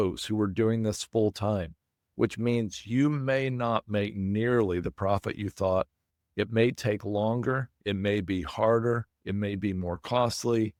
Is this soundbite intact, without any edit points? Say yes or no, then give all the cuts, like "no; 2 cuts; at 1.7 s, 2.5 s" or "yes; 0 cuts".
yes; 0 cuts